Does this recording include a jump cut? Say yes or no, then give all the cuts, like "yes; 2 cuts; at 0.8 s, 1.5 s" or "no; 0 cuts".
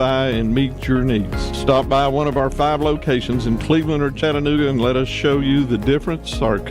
no; 0 cuts